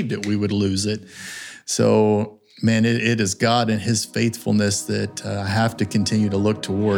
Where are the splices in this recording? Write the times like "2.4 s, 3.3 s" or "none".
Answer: none